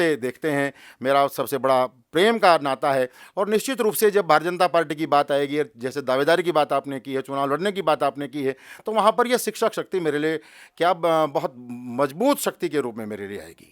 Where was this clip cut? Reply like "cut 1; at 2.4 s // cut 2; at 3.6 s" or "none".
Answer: none